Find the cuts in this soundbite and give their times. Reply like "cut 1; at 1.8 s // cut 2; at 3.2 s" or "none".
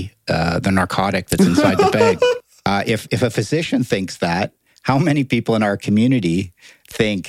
cut 1; at 2.5 s